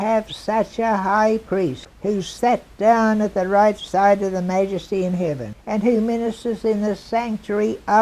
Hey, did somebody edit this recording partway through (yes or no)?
yes